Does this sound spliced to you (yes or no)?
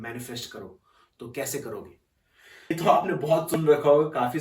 yes